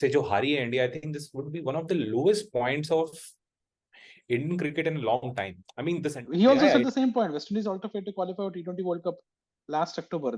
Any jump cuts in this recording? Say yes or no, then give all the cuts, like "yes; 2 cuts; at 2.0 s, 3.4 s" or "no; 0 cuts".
yes; 1 cut; at 6.2 s